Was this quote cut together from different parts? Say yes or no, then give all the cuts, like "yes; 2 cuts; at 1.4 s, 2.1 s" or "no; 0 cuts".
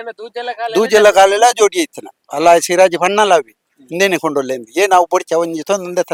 no; 0 cuts